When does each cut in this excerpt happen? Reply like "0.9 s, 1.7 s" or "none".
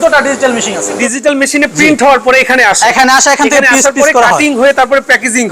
0.9 s